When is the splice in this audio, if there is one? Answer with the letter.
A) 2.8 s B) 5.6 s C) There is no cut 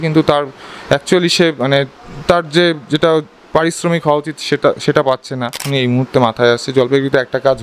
B